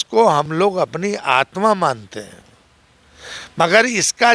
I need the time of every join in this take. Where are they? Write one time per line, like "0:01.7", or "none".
none